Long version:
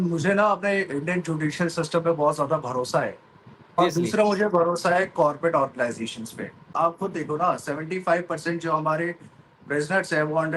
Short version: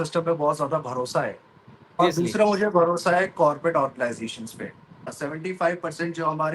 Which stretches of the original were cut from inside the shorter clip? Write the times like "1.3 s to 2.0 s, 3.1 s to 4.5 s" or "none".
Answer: 6.8 s to 7.5 s